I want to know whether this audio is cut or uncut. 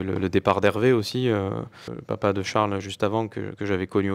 cut